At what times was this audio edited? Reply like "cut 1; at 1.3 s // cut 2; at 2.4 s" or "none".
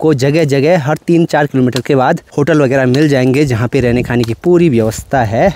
cut 1; at 2.3 s

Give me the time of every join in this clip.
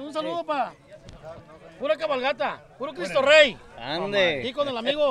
none

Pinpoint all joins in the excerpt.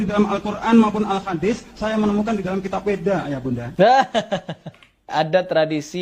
cut 1; at 3.6 s // cut 2; at 5.1 s

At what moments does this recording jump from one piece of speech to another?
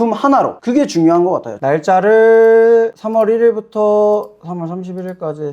cut 1; at 1.5 s

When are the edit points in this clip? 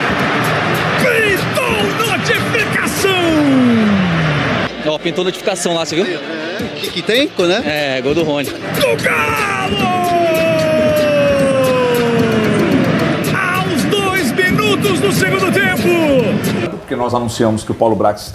cut 1; at 16.8 s

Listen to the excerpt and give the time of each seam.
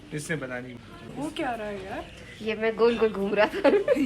cut 1; at 1.1 s

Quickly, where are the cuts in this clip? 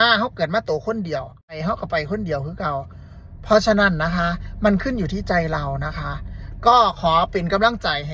cut 1; at 1.6 s

